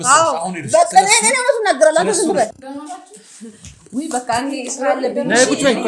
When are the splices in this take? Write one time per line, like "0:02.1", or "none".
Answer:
0:02.5